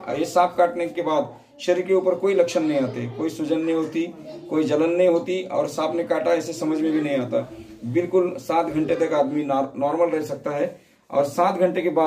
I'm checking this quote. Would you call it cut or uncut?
uncut